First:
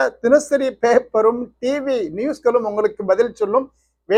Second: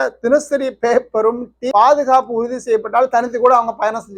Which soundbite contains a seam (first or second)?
second